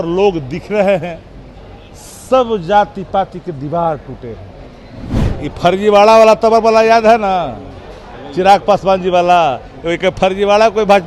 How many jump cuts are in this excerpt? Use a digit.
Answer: 1